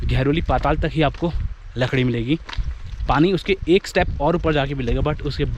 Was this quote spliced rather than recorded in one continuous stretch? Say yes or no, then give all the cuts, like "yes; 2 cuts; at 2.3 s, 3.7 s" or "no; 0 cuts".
no; 0 cuts